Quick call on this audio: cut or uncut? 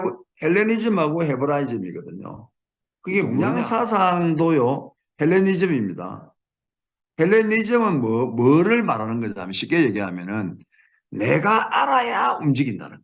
cut